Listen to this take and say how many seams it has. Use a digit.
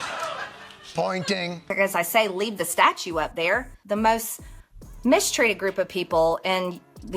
1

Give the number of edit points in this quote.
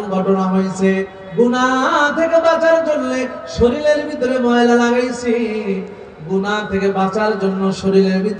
0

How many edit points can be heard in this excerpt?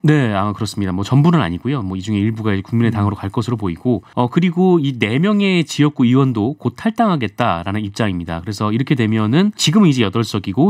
2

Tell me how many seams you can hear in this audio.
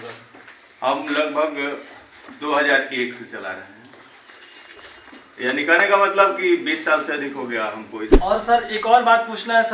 1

